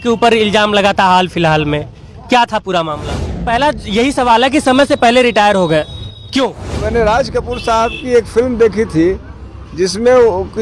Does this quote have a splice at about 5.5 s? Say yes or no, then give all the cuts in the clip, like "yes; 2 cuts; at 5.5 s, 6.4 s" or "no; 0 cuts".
no; 2 cuts; at 3.4 s, 6.8 s